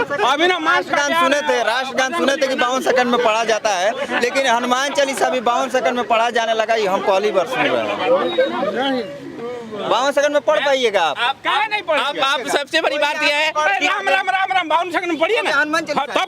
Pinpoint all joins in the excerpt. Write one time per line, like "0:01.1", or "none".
none